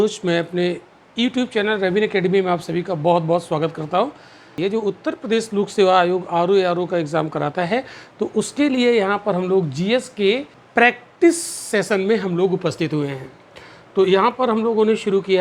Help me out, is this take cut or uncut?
cut